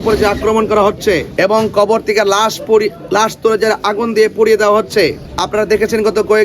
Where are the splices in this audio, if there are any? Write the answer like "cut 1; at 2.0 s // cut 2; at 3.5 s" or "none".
cut 1; at 1.3 s // cut 2; at 5.3 s